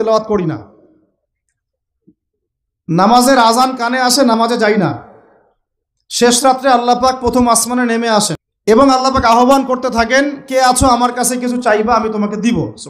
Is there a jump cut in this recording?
yes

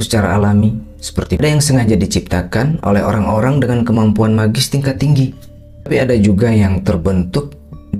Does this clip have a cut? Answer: yes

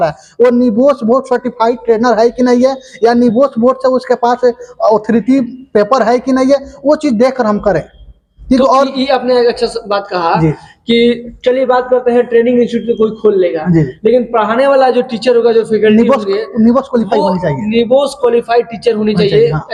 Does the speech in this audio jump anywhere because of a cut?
no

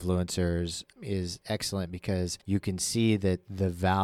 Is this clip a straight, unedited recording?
no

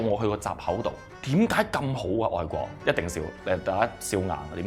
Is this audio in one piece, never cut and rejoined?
no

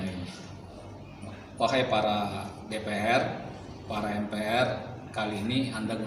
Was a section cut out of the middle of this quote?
yes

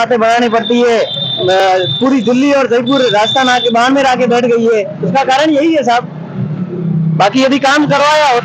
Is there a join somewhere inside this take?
no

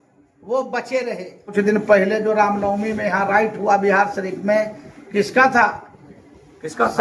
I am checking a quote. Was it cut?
yes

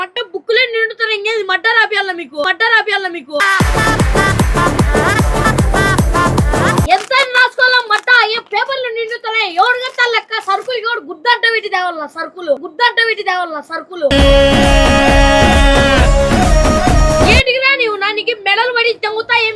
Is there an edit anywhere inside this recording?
yes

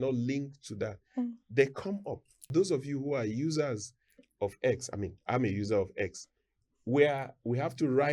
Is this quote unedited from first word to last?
no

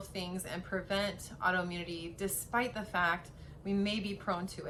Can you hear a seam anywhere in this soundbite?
no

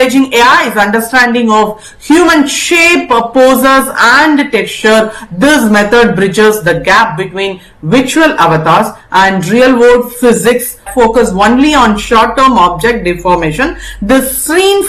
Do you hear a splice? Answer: yes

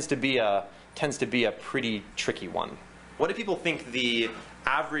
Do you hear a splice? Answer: yes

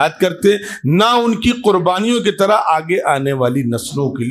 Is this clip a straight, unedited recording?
yes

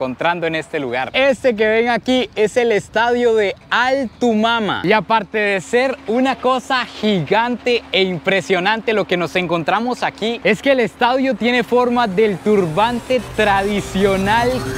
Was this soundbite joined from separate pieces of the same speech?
no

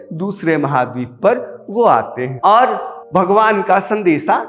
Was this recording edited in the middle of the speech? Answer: yes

